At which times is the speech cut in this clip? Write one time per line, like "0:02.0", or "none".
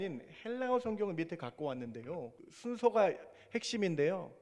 0:02.5

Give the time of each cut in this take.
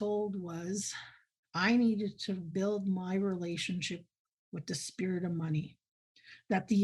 0:02.4

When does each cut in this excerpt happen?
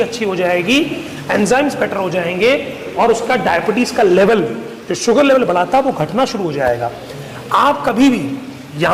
none

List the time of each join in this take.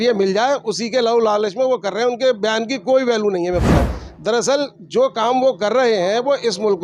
0:03.9

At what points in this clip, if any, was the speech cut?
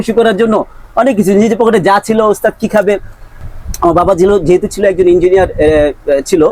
0:03.3

